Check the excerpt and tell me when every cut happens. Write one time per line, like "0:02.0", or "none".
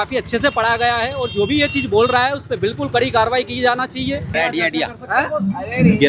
0:04.3